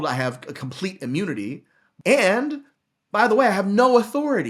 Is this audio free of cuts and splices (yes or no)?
no